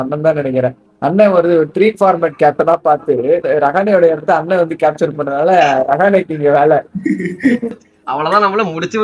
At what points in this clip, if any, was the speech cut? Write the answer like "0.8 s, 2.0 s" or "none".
3.4 s, 7.7 s